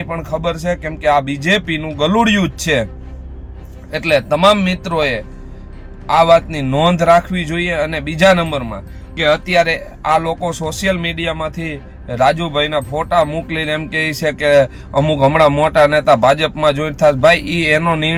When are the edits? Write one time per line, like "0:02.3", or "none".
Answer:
none